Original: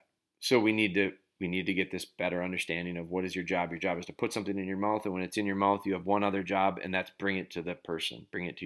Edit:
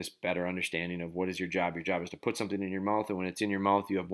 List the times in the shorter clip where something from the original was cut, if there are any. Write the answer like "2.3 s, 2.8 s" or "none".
none